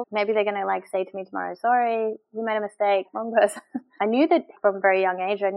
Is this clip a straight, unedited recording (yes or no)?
no